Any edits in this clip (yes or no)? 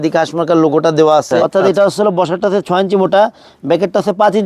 yes